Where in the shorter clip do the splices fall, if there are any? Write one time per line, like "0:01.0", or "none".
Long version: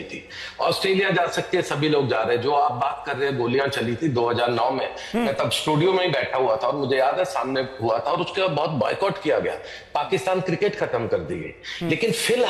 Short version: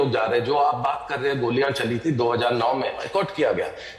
0:03.1